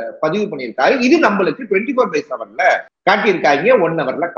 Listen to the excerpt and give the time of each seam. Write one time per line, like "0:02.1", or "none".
0:02.9